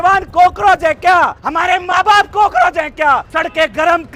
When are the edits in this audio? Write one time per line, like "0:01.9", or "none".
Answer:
0:01.4
0:03.3